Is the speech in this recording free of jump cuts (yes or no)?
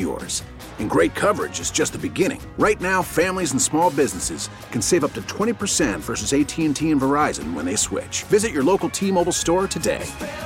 yes